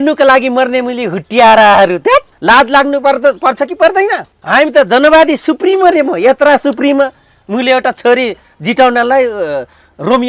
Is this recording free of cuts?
no; 2 cuts; at 2.3 s, 4.3 s

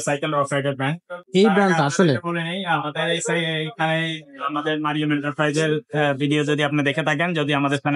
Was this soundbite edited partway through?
no; 0 cuts

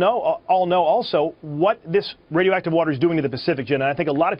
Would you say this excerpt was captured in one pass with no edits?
yes; 0 cuts

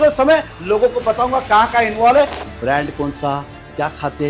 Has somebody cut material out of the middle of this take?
yes; 1 cut; at 2.4 s

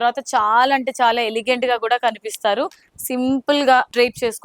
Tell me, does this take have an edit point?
no; 0 cuts

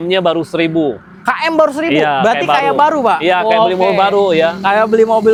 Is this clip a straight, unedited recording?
yes; 0 cuts

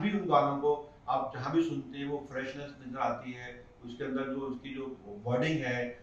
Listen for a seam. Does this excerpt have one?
no; 0 cuts

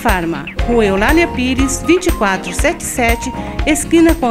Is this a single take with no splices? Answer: yes; 0 cuts

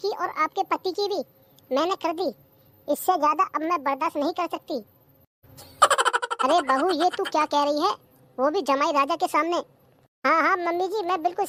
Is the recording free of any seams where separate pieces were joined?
yes; 0 cuts

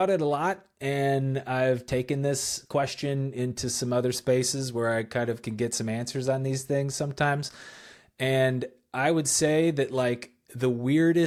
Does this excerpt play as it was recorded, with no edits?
yes; 0 cuts

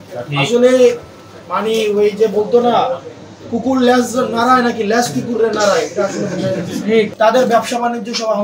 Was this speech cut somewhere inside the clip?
yes; 1 cut; at 7.1 s

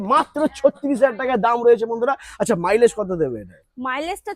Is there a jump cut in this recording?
no; 0 cuts

